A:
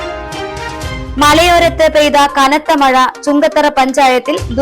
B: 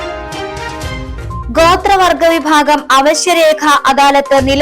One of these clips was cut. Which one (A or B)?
B